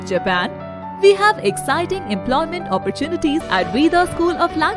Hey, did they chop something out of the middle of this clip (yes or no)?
yes